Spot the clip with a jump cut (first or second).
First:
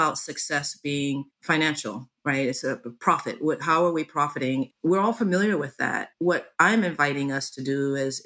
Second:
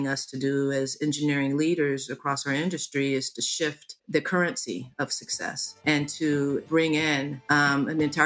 first